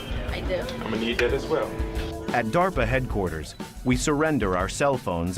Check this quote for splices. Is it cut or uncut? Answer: cut